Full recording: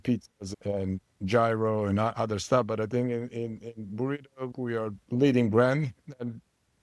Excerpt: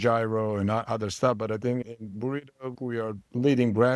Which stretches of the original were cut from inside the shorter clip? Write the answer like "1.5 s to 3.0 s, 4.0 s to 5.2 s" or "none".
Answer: 3.1 s to 3.6 s